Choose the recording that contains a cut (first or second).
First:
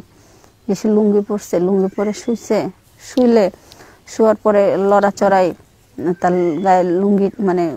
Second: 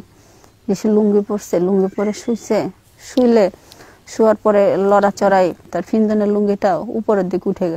second